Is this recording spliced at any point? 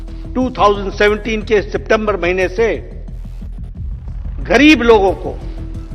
no; 0 cuts

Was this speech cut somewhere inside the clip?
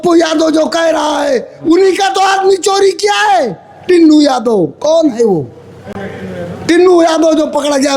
no; 0 cuts

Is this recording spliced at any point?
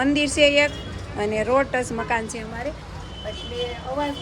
no; 0 cuts

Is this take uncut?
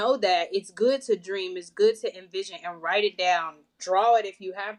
yes; 0 cuts

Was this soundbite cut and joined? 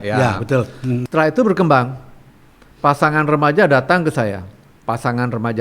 yes; 1 cut; at 1.0 s

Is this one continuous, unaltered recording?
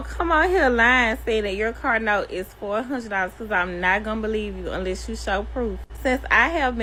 yes; 0 cuts

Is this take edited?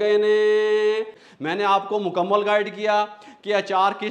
yes; 1 cut; at 1.1 s

